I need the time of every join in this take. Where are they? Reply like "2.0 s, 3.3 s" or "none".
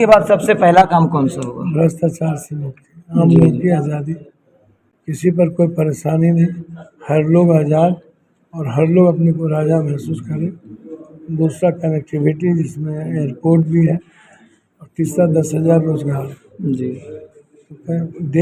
none